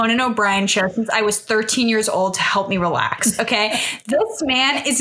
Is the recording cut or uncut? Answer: uncut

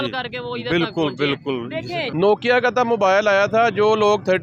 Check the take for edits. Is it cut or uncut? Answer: cut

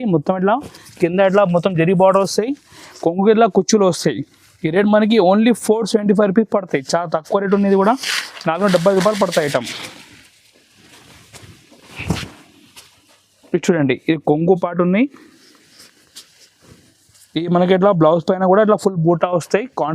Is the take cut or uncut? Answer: uncut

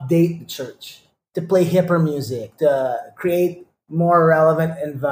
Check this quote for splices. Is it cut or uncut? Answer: cut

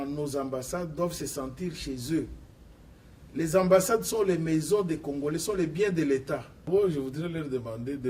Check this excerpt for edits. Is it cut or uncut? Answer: cut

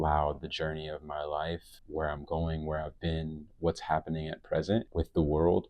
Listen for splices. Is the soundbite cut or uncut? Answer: cut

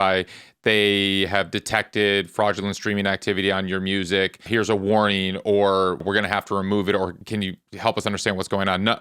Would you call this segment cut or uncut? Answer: cut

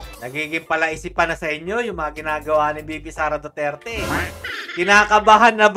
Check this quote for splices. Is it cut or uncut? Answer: uncut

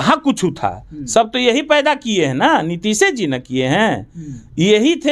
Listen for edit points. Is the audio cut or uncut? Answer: uncut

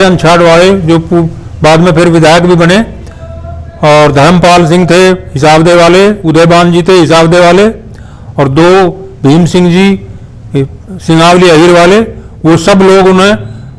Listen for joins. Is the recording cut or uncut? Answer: uncut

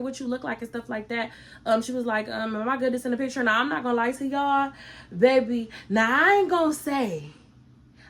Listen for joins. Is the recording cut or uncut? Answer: uncut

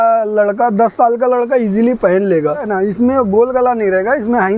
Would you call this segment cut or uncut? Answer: cut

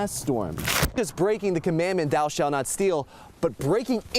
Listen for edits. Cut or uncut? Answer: cut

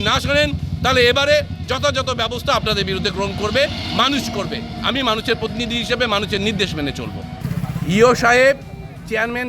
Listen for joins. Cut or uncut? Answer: cut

